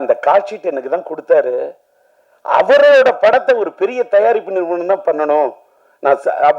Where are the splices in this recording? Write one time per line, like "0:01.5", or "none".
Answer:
none